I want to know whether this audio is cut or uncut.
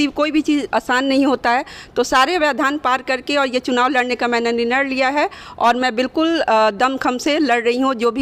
uncut